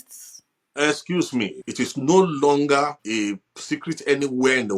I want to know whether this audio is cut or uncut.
cut